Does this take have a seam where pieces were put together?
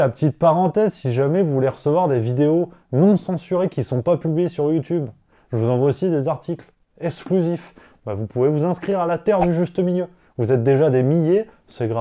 no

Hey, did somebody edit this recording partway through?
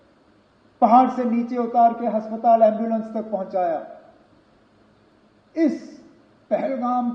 yes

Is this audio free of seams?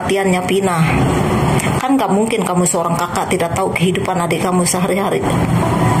yes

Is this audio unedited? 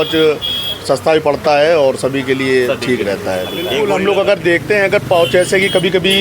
no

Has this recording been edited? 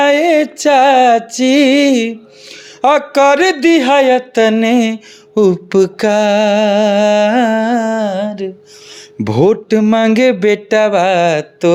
no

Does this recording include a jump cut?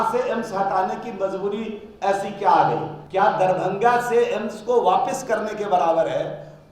yes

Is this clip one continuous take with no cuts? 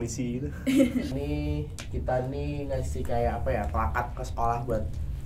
no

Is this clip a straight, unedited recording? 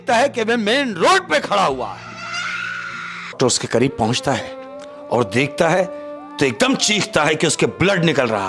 no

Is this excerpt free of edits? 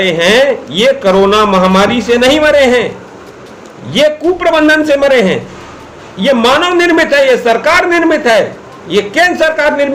yes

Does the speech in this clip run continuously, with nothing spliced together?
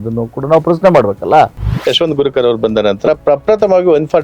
no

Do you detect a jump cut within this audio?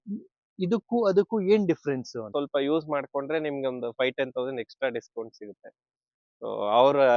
yes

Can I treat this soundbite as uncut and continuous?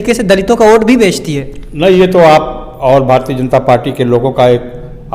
yes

